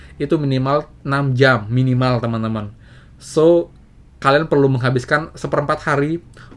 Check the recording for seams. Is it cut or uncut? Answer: uncut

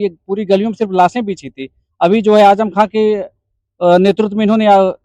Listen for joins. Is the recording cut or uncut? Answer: uncut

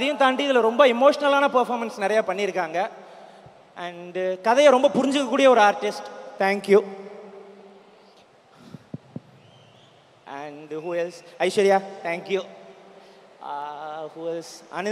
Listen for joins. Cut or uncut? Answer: uncut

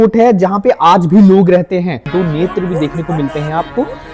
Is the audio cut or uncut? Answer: cut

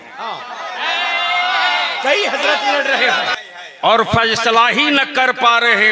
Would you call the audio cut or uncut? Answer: cut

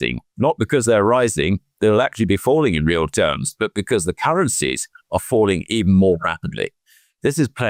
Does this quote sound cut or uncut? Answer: uncut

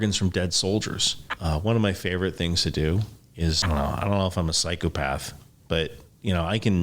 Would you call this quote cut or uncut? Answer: cut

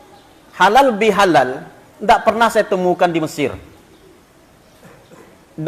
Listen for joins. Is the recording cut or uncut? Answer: uncut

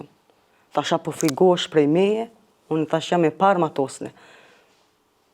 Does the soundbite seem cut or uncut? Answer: uncut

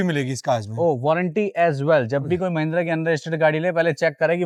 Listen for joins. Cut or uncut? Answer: uncut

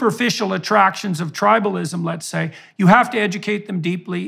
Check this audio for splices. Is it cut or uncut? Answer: uncut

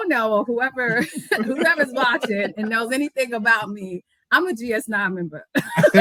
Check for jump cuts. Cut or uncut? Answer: uncut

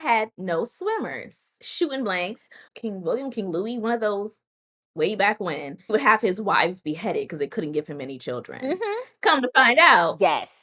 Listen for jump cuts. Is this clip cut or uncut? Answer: cut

